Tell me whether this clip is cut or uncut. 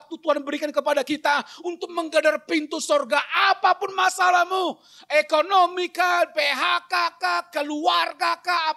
uncut